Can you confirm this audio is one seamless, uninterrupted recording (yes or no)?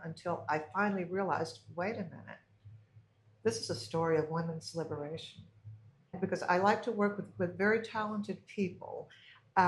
no